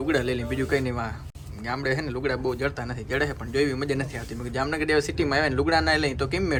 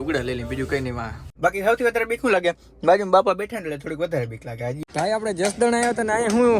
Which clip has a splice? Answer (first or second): second